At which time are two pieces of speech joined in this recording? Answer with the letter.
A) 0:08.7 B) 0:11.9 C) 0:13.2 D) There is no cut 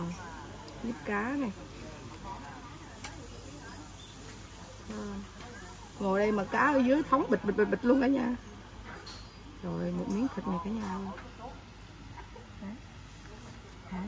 D